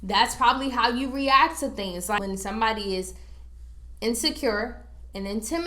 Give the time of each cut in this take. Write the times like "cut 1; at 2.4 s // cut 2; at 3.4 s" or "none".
cut 1; at 2.2 s

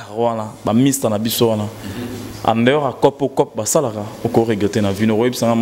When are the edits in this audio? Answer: none

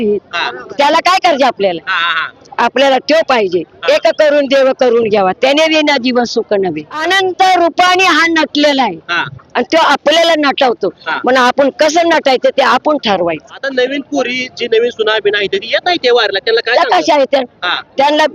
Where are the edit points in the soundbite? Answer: cut 1; at 7.0 s // cut 2; at 13.5 s

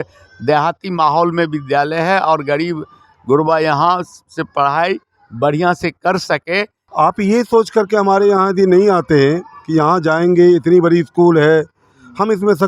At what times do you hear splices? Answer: cut 1; at 6.8 s

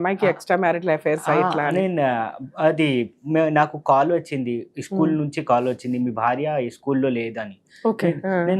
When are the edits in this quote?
none

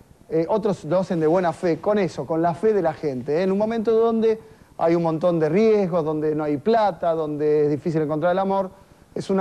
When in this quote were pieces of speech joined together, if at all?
cut 1; at 4.6 s

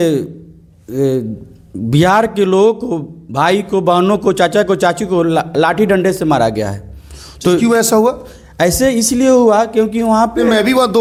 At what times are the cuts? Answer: none

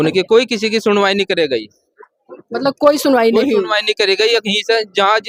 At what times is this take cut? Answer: none

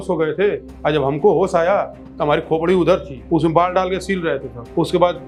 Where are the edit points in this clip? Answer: none

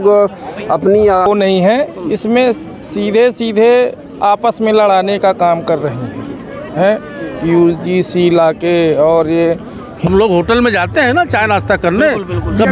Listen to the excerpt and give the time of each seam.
cut 1; at 1.3 s // cut 2; at 9.9 s

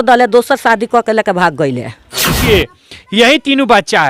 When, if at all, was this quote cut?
cut 1; at 2.3 s

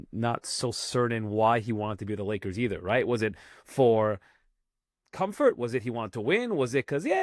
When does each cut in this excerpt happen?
none

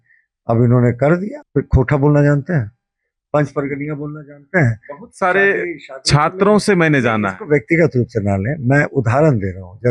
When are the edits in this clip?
cut 1; at 1.4 s

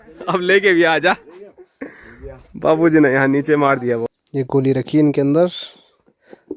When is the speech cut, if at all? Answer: cut 1; at 4.0 s

